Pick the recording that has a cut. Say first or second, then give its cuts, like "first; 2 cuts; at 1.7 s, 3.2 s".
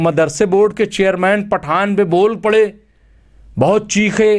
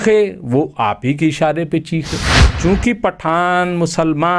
second; 1 cut; at 2.5 s